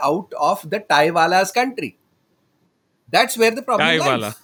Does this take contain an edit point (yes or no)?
no